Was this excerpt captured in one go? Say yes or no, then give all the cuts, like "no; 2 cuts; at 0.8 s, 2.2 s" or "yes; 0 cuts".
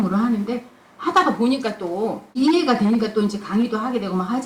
no; 1 cut; at 2.4 s